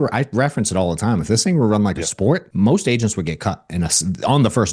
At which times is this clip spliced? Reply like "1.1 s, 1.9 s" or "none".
2.5 s

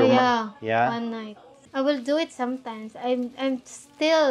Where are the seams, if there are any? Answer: 1.6 s

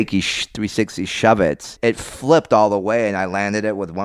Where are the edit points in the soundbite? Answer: 1.7 s

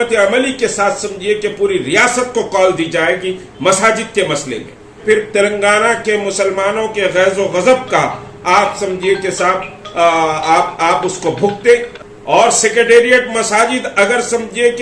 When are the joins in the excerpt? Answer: 5.0 s, 12.0 s

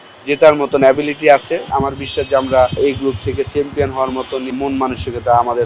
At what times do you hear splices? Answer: 1.7 s, 2.8 s, 4.6 s

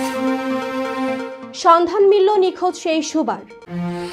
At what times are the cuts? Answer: none

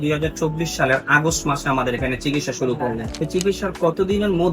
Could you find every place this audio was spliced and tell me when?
3.1 s

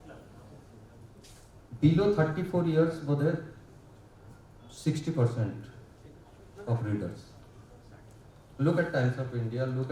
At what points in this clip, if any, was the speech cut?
8.2 s

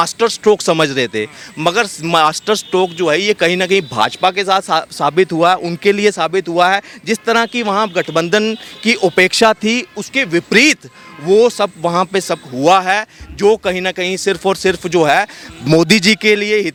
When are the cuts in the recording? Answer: none

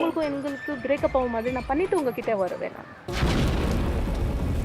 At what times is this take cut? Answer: 2.8 s

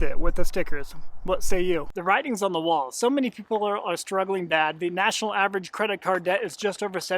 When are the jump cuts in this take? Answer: 1.9 s

